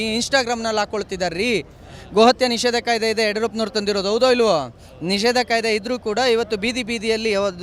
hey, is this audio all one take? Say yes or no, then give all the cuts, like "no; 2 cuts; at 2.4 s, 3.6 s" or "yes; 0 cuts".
yes; 0 cuts